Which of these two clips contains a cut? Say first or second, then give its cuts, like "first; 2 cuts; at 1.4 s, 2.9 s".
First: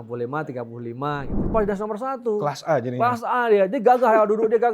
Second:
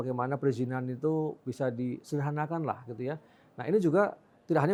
first; 1 cut; at 1.3 s